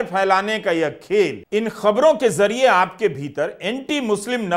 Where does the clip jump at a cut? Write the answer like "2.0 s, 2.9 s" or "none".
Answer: 1.4 s